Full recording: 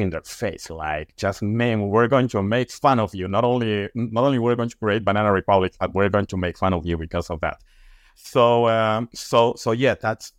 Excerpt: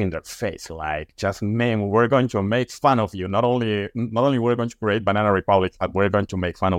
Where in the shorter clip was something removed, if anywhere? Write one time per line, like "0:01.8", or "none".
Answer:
none